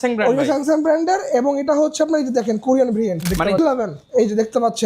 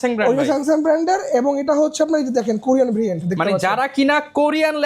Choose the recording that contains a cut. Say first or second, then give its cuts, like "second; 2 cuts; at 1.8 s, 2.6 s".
first; 1 cut; at 3.6 s